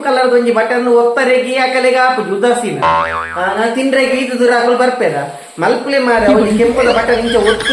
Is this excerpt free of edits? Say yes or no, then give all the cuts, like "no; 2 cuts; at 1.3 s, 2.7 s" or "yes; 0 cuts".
yes; 0 cuts